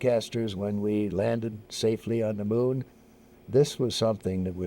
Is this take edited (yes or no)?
yes